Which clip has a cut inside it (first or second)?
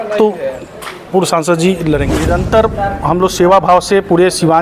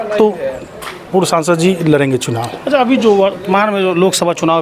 first